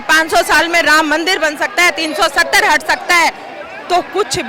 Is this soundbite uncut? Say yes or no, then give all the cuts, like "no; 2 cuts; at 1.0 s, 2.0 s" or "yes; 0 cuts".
yes; 0 cuts